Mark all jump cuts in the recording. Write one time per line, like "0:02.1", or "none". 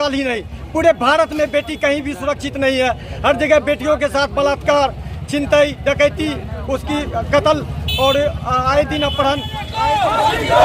0:09.6